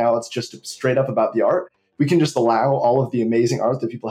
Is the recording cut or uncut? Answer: uncut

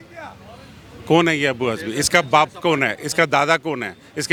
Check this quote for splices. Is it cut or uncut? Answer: uncut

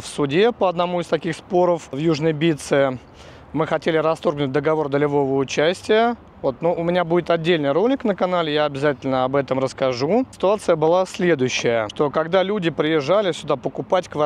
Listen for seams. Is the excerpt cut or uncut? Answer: uncut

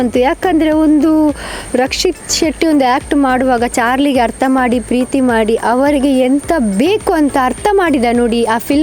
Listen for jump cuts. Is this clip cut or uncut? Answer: uncut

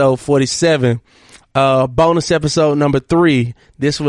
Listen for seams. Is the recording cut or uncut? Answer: cut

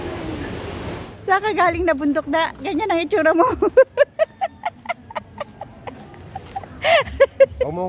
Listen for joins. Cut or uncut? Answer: cut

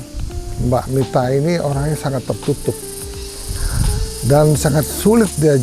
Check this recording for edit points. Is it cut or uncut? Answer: uncut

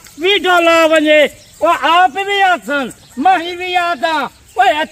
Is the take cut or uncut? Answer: uncut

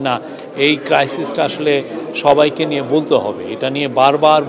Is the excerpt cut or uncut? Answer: uncut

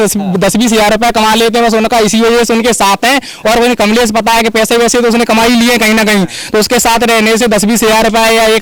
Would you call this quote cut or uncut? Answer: uncut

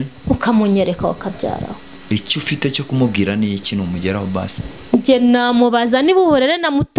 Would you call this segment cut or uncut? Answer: uncut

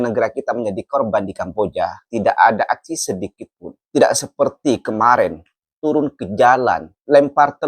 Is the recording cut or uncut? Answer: cut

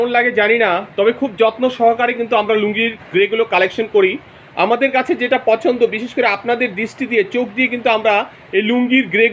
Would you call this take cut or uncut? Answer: uncut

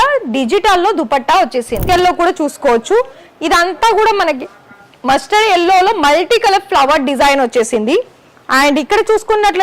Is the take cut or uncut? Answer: cut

